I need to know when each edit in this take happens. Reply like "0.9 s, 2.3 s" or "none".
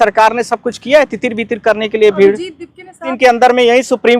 3.1 s